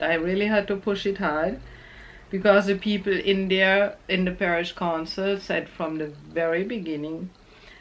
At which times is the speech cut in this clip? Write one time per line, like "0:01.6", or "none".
none